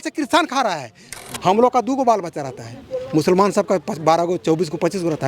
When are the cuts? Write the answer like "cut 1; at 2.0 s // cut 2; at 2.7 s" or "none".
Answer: cut 1; at 1.1 s